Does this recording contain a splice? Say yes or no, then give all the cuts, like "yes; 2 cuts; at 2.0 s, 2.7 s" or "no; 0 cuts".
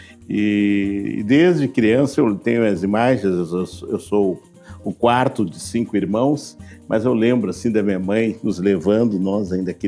no; 0 cuts